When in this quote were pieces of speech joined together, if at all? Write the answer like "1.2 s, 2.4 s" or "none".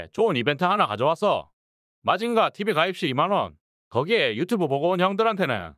2.2 s

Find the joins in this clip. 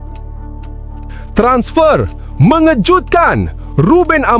1.3 s

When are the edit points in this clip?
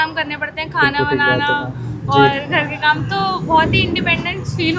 none

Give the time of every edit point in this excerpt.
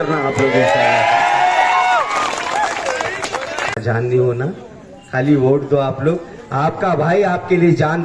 3.8 s

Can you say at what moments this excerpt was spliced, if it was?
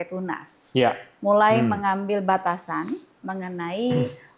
none

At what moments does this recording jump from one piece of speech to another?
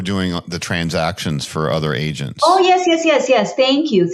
none

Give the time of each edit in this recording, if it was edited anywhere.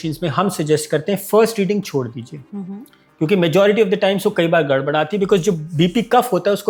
none

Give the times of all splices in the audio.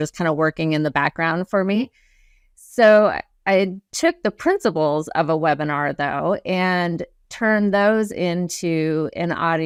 none

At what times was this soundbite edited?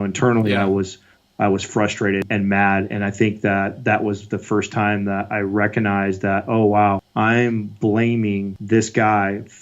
2.3 s, 7.1 s, 8.5 s

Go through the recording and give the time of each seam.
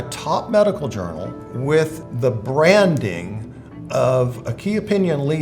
1.4 s, 2.0 s

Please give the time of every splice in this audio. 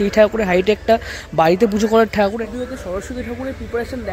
2.4 s

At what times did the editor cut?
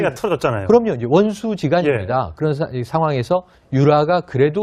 none

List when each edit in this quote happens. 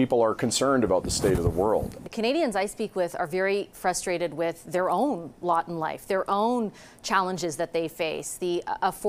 1.9 s

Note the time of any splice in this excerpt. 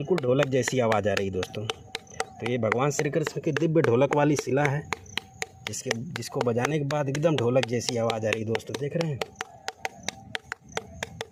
none

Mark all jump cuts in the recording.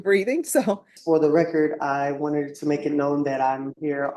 0.9 s

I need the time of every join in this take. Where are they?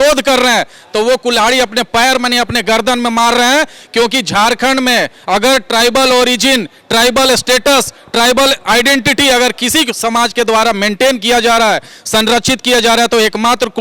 none

